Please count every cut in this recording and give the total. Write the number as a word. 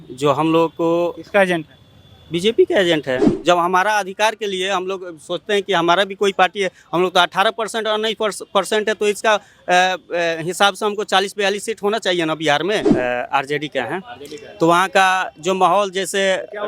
two